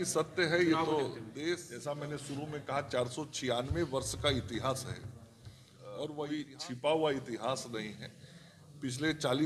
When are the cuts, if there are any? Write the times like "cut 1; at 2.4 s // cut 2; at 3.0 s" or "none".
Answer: cut 1; at 1.7 s // cut 2; at 6.3 s